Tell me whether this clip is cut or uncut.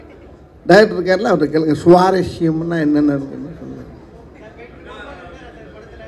uncut